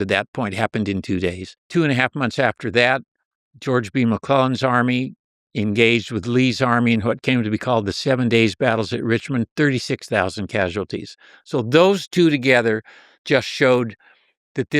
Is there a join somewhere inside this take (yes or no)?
yes